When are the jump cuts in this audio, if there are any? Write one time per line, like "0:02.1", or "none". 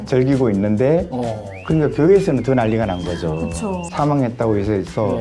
0:03.8